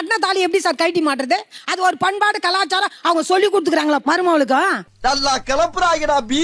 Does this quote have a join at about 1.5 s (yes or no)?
no